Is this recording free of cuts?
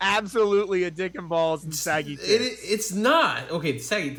yes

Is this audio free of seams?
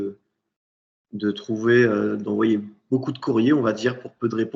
yes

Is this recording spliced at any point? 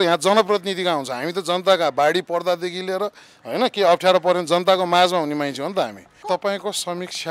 yes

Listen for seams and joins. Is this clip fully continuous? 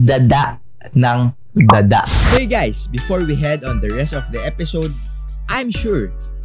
no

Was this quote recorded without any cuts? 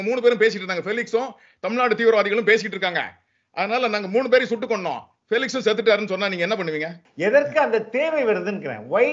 no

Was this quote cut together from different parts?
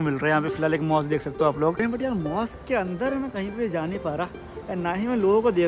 yes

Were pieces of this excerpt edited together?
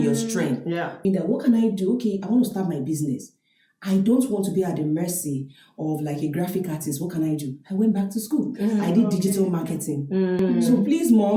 yes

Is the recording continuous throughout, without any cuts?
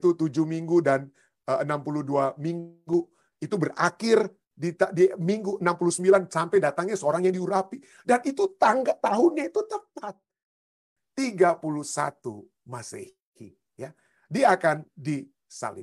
no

